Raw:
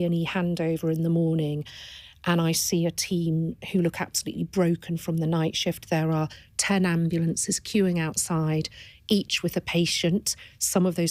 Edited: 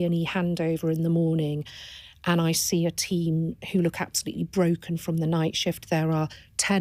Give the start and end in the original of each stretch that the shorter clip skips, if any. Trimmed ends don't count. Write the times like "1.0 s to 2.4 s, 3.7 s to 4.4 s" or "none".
none